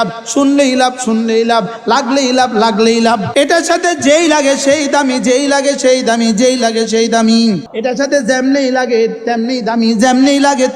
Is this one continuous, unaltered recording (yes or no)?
no